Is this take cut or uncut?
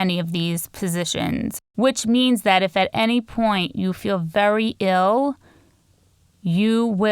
cut